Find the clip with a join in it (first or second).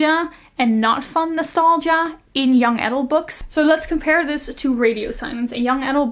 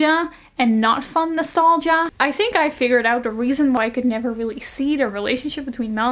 second